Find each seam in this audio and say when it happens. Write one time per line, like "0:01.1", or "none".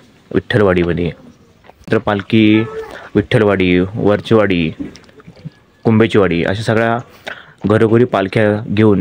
0:01.9

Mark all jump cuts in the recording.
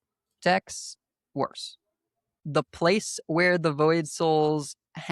0:02.4

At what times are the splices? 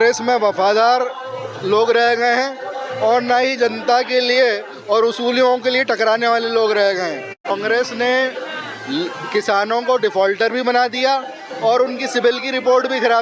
0:07.4

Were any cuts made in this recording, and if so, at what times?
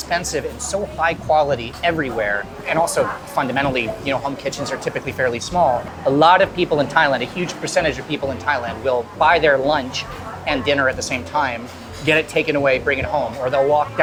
none

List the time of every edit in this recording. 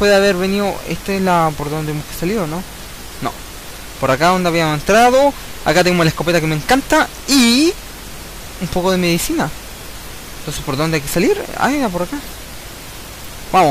0:07.7

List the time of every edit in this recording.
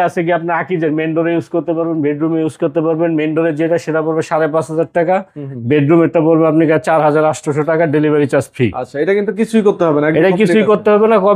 none

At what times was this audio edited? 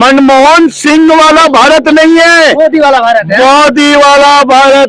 none

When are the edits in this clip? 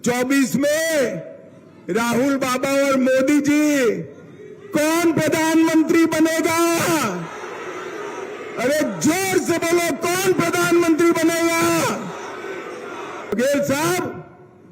0:13.3

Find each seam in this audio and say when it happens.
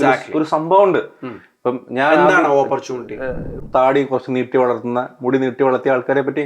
0:03.6

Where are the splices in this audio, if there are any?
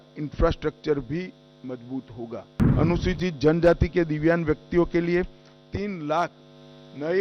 0:02.6

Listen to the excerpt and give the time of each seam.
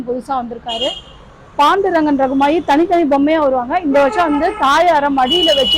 none

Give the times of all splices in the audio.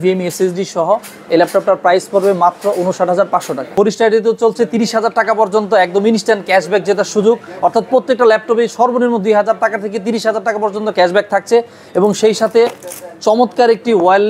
0:03.7

